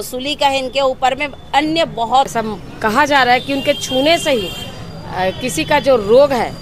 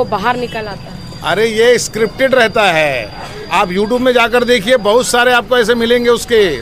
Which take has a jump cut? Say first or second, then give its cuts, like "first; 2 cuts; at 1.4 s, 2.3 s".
first; 1 cut; at 2.3 s